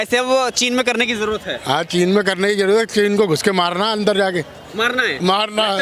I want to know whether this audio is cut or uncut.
uncut